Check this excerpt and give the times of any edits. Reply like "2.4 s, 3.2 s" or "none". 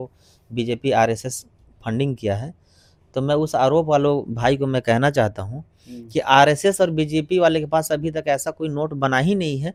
none